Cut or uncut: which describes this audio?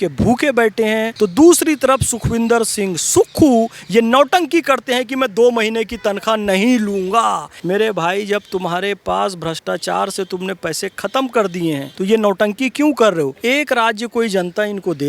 cut